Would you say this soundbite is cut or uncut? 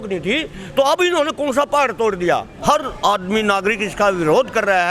cut